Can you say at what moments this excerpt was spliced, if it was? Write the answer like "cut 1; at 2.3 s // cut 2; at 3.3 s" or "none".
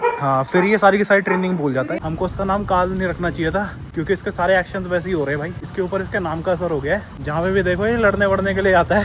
cut 1; at 2.0 s // cut 2; at 3.8 s // cut 3; at 5.6 s // cut 4; at 7.2 s